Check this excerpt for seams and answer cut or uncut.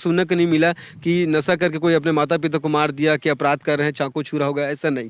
uncut